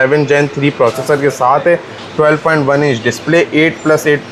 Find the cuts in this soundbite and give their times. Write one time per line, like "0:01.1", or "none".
none